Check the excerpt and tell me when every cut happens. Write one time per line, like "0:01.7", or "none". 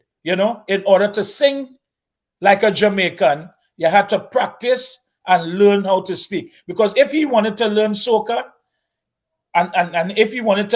none